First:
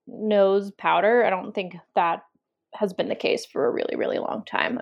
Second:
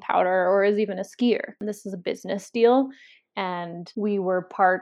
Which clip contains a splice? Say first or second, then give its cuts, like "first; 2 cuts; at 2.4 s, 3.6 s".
second; 2 cuts; at 1.5 s, 3.8 s